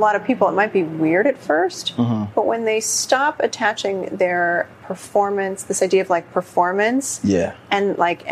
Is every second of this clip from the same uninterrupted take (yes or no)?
yes